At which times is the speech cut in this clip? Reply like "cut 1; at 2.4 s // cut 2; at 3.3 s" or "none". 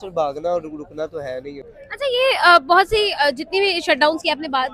none